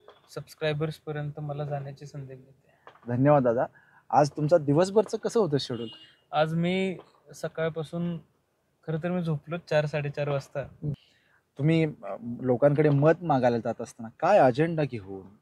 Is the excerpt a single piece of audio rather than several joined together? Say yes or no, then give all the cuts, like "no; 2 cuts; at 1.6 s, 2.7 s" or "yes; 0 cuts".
no; 1 cut; at 10.9 s